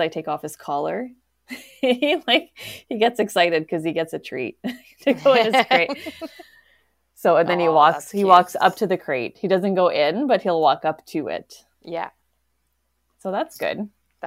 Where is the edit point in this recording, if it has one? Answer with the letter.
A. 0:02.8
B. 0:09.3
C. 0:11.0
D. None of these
D